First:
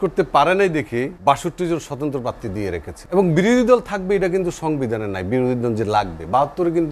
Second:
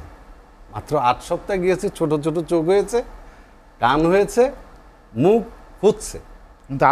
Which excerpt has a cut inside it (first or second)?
first